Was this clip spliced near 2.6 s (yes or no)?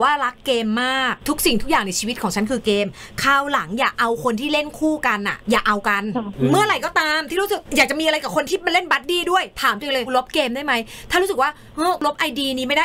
no